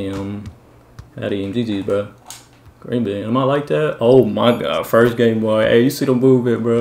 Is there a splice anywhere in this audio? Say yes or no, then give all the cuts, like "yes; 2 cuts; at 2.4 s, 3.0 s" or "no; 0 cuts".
yes; 1 cut; at 5.6 s